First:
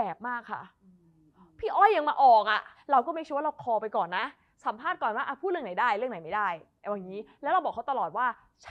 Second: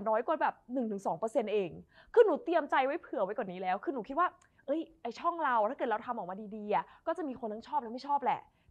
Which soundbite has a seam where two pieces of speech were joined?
first; 1 cut; at 2.7 s

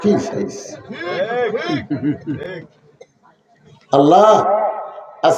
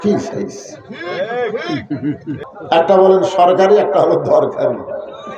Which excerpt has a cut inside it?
second; 1 cut; at 2.5 s

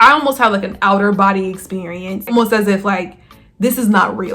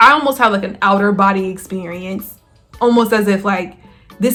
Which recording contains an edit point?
first; 1 cut; at 2.3 s

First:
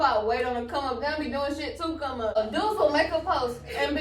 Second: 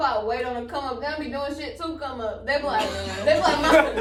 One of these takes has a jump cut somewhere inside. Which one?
first; 1 cut; at 2.4 s

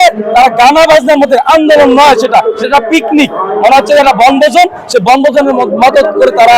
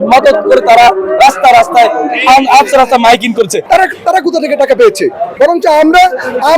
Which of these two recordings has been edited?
second; 2 cuts; at 3.6 s, 5.2 s

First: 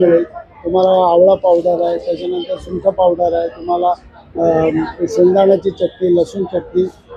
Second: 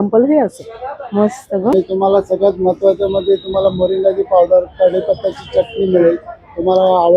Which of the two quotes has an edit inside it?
second; 1 cut; at 1.7 s

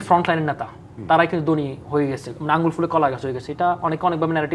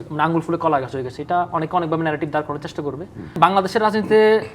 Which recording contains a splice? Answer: second; 1 cut; at 3.4 s

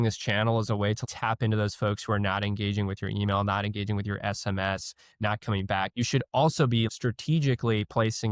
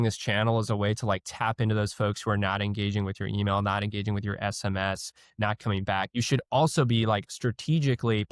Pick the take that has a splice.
first; 2 cuts; at 1.0 s, 6.9 s

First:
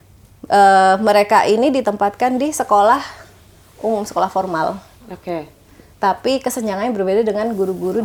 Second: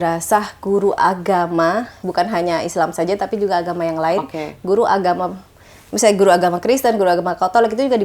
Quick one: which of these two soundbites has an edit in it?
second; 1 cut; at 2.0 s

